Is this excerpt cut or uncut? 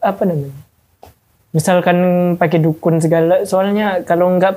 uncut